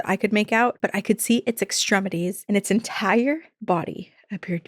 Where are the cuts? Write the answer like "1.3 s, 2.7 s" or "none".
0.8 s, 2.4 s, 3.5 s